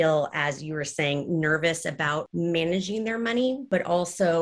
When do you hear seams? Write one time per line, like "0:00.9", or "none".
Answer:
0:02.3
0:03.6